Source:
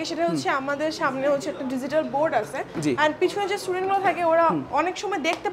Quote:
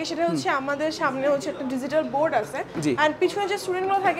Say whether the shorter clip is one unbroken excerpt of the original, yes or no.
yes